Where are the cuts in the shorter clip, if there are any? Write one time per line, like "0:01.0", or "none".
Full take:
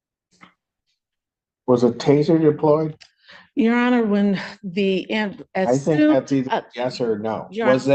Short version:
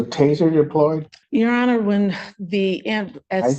0:01.1

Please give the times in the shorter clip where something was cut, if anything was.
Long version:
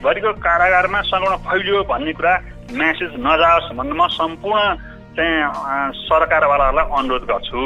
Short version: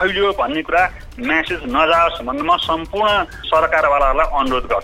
0:03.4

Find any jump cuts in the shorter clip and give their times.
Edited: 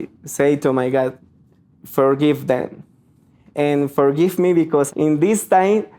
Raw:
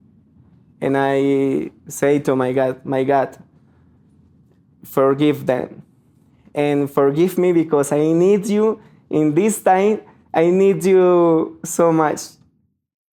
0:01.2
0:04.9

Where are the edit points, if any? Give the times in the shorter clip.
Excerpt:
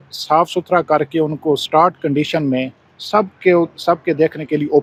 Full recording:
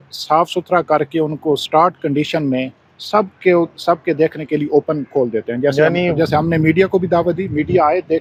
none

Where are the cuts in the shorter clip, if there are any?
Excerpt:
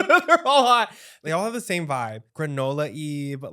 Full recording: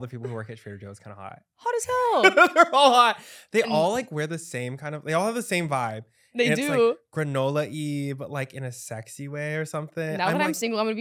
0:01.1
0:02.3

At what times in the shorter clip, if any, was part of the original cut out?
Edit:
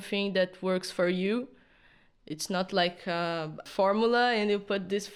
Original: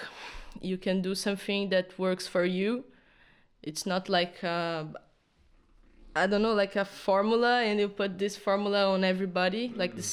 0:03.6

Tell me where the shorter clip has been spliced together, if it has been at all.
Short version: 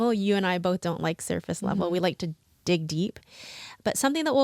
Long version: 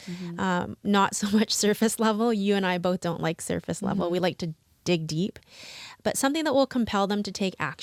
none

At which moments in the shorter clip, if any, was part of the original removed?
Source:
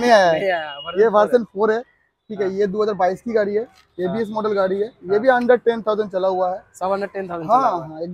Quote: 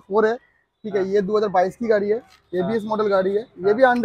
none

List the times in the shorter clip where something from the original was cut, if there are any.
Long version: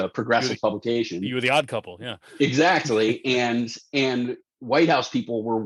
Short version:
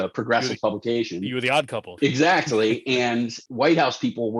0:01.8
0:03.4

